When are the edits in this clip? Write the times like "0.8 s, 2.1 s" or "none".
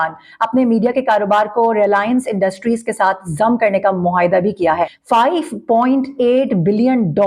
4.9 s